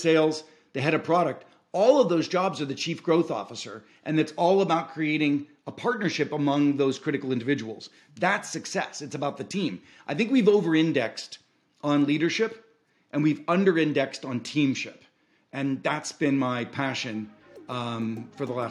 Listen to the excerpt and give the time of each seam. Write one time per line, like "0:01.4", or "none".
none